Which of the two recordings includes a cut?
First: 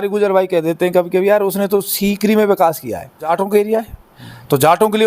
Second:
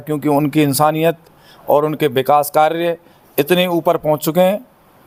first; 1 cut; at 3.3 s

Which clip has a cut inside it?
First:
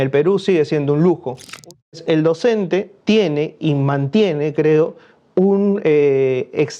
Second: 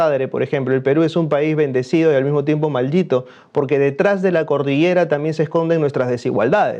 first; 2 cuts; at 1.7 s, 2.9 s

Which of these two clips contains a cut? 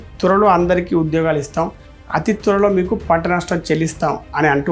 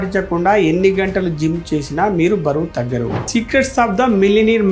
second; 1 cut; at 3.2 s

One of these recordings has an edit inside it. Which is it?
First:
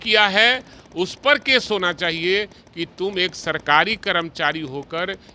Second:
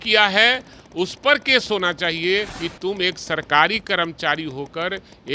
second; 1 cut; at 2.6 s

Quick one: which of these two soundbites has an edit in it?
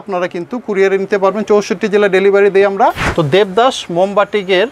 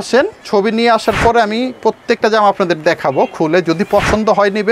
first; 1 cut; at 3.0 s

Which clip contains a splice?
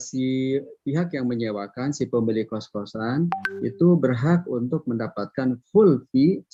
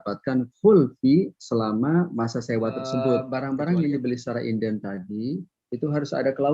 second; 1 cut; at 3.3 s

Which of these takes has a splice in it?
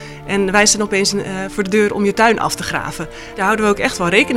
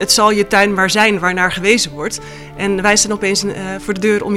first; 1 cut; at 3.4 s

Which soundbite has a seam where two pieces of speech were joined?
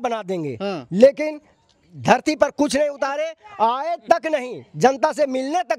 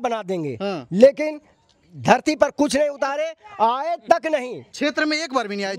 second; 1 cut; at 4.6 s

